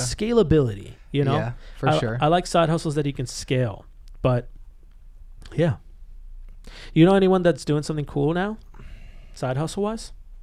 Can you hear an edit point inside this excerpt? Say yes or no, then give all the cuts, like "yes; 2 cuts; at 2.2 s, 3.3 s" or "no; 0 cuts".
no; 0 cuts